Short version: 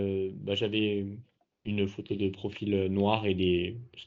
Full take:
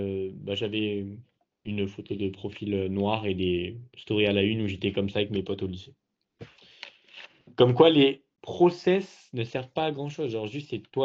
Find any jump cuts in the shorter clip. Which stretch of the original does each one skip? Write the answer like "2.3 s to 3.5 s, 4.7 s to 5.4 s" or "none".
none